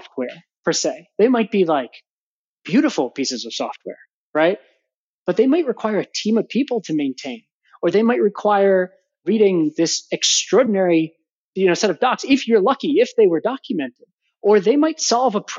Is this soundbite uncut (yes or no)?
yes